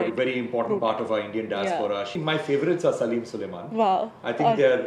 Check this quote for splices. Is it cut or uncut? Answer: cut